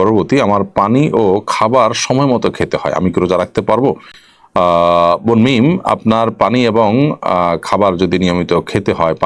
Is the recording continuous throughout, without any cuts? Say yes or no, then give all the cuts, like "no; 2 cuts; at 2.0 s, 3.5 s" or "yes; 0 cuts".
yes; 0 cuts